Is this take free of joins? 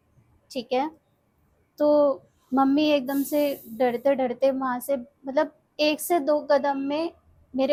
yes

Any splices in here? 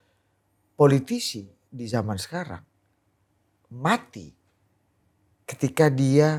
no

